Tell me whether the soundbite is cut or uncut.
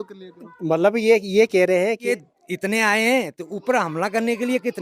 cut